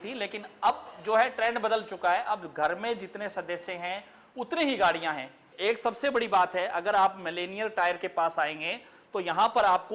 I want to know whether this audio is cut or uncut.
cut